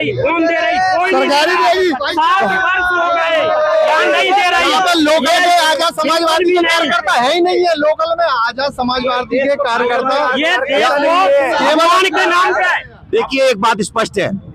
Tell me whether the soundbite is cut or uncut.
uncut